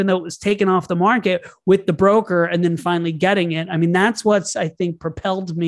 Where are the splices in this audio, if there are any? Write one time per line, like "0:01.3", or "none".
none